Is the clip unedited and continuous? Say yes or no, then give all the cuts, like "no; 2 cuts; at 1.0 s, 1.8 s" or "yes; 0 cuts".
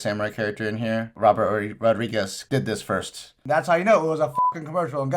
no; 3 cuts; at 1.1 s, 2.4 s, 3.4 s